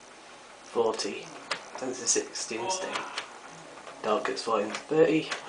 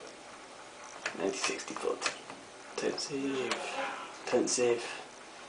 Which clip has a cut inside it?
first; 1 cut; at 2.2 s

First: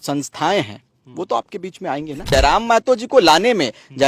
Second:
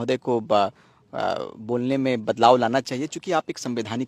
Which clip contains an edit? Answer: first; 1 cut; at 2.2 s

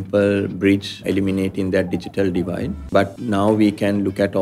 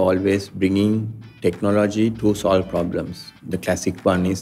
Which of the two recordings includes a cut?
first; 2 cuts; at 1.0 s, 3.1 s

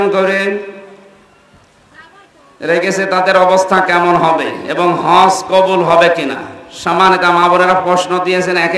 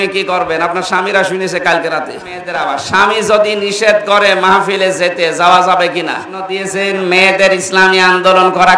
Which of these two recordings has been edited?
second; 2 cuts; at 2.5 s, 6.6 s

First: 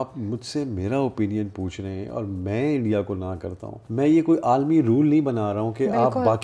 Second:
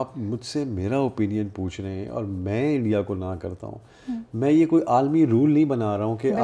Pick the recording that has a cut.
first; 1 cut; at 3.8 s

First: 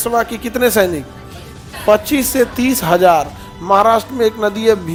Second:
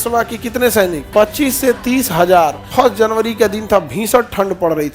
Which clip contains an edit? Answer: second; 2 cuts; at 1.0 s, 2.6 s

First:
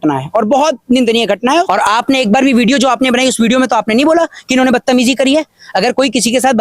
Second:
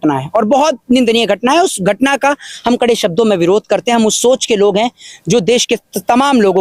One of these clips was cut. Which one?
first; 1 cut; at 1.7 s

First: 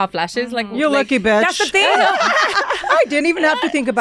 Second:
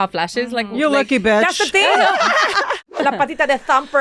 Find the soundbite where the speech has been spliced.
second; 1 cut; at 2.9 s

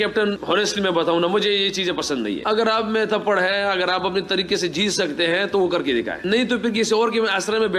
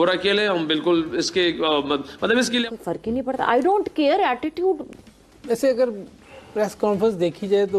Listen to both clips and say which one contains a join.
second; 1 cut; at 2.6 s

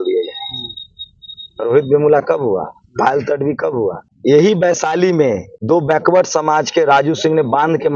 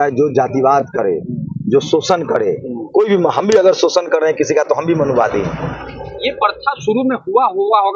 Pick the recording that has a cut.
first; 2 cuts; at 4.1 s, 5.5 s

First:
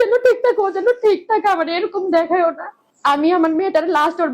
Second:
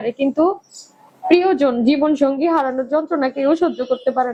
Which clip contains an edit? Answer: first; 1 cut; at 2.9 s

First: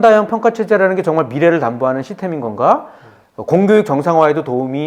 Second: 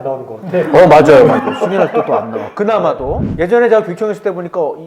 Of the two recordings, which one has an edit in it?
second; 1 cut; at 3.2 s

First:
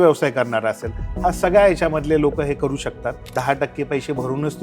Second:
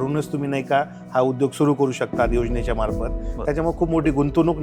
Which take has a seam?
first; 1 cut; at 3.2 s

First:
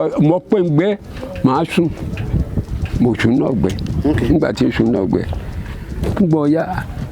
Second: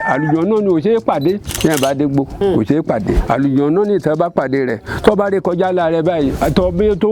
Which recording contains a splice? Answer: second; 4 cuts; at 1.5 s, 2.3 s, 3.2 s, 6.3 s

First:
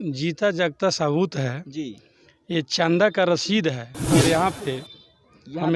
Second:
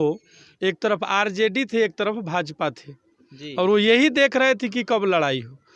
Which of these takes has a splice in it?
first; 1 cut; at 3.9 s

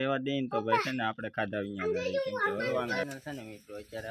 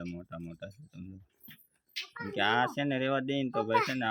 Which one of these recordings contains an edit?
first; 1 cut; at 3.0 s

